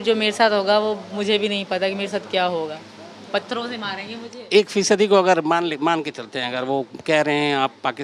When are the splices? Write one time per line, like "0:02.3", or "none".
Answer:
none